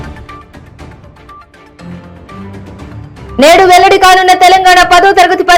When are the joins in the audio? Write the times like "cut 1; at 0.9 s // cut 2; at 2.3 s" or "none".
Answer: cut 1; at 1.9 s